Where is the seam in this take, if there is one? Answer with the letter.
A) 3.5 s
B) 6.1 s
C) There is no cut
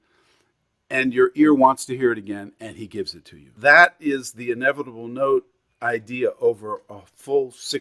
A